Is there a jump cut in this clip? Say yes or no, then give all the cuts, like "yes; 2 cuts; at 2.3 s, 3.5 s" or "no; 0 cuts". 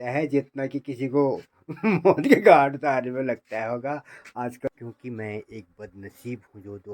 yes; 1 cut; at 4.7 s